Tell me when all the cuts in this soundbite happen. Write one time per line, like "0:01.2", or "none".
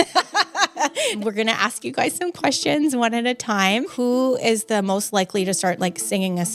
0:01.2
0:03.9